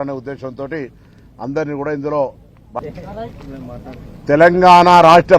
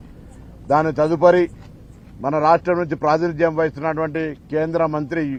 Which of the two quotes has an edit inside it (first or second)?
first